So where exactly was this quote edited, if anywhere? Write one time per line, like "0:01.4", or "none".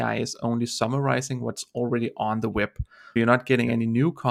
0:03.2